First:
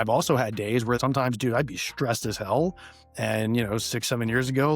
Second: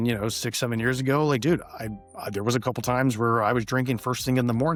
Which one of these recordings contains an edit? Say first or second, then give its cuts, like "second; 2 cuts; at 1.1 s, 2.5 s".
first; 1 cut; at 1.0 s